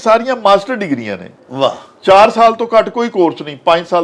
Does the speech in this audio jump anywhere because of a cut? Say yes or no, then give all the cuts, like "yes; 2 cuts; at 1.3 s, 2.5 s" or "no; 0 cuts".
no; 0 cuts